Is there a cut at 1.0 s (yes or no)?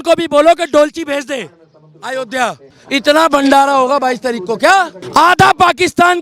no